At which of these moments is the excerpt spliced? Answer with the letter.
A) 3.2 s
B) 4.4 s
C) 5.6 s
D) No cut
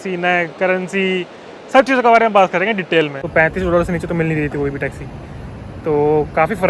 A